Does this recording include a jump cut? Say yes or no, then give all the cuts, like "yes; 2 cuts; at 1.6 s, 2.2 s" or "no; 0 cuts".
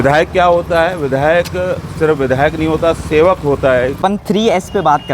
yes; 1 cut; at 4.0 s